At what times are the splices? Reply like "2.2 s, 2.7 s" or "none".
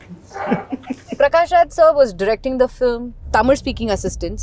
1.1 s, 3.1 s